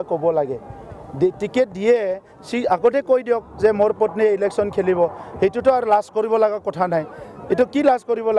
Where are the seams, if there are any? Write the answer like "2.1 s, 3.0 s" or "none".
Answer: none